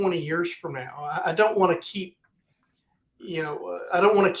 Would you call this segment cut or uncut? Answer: uncut